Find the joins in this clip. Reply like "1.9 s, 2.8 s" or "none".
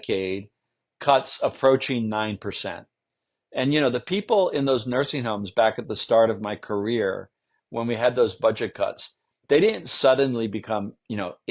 none